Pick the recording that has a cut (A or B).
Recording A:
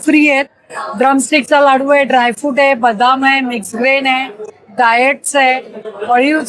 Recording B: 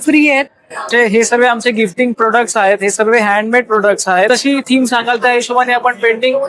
B